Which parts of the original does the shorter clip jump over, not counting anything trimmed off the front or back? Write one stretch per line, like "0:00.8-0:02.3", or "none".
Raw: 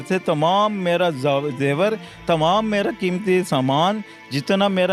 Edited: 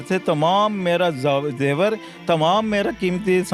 none